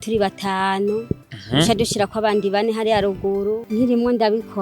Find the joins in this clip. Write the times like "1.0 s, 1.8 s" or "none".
3.6 s